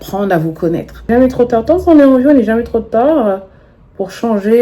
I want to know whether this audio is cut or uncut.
cut